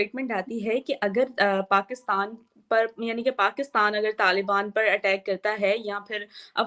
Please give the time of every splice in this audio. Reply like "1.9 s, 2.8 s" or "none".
none